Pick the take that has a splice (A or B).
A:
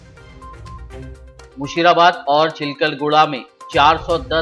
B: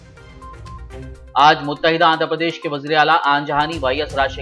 A